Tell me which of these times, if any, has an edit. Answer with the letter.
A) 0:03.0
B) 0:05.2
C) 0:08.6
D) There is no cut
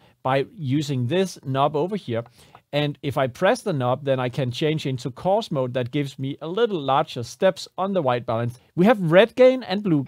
C